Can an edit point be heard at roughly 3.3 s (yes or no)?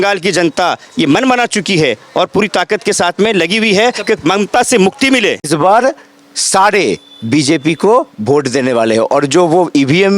no